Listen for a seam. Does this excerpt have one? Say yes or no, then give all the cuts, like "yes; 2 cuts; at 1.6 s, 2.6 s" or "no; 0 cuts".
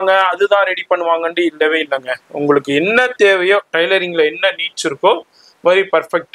no; 0 cuts